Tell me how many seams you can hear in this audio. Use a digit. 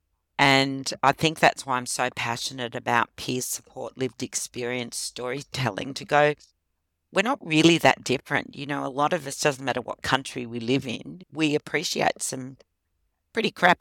1